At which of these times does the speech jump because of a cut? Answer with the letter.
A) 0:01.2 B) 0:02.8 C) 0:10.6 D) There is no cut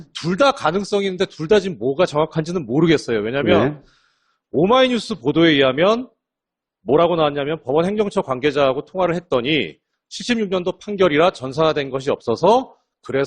C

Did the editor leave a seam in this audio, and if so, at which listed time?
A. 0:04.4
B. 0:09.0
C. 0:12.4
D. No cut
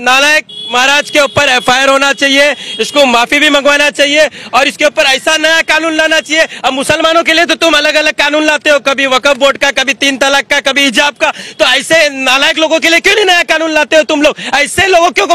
D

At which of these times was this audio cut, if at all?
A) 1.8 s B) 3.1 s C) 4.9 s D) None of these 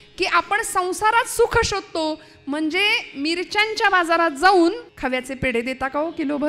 C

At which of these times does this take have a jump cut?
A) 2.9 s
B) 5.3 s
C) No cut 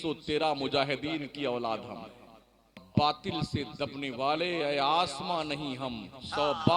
A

